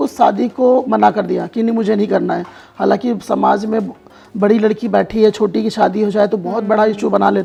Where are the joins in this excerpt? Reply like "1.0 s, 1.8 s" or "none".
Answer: none